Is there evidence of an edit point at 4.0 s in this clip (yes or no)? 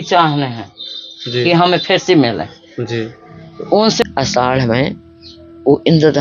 yes